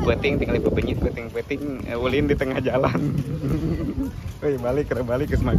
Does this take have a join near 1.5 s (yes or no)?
no